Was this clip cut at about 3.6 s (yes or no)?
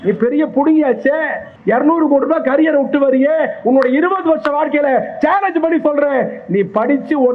no